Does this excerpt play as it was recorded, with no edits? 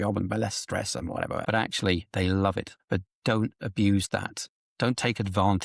no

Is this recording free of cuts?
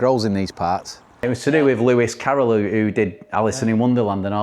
no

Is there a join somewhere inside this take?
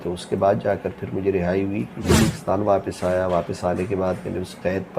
yes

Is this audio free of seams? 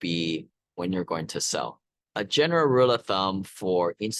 yes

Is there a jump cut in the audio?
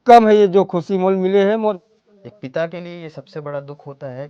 yes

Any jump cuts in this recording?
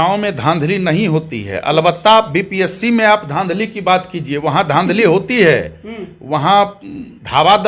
no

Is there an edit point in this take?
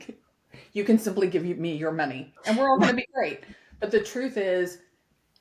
no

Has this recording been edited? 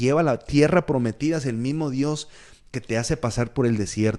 no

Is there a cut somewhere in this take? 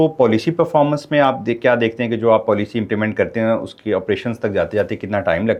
no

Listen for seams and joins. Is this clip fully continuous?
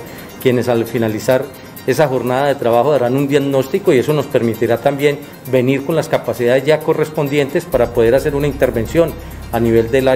yes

